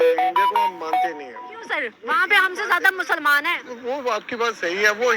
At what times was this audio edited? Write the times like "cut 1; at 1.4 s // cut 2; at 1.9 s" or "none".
cut 1; at 1.1 s